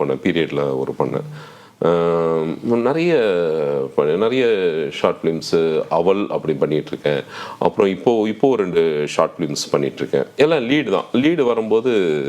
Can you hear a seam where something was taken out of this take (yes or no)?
no